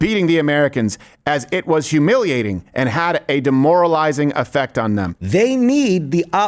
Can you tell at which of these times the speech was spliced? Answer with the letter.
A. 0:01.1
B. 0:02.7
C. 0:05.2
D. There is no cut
C